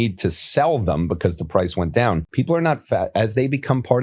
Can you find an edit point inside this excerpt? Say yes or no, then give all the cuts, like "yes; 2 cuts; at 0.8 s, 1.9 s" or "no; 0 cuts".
yes; 1 cut; at 2.3 s